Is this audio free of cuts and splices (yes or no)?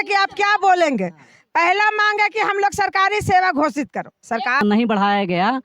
no